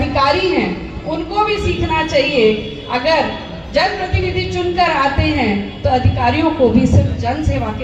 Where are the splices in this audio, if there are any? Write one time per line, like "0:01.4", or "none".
none